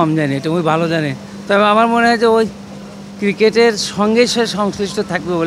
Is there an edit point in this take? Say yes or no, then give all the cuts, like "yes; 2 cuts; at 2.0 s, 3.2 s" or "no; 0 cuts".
no; 0 cuts